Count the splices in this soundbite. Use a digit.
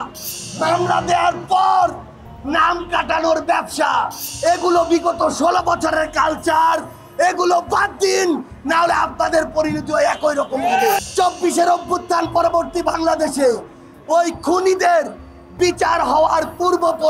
2